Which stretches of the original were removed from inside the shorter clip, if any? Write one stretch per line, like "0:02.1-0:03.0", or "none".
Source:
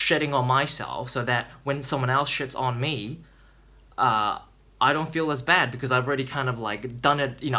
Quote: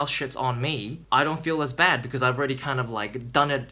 0:03.1-0:04.6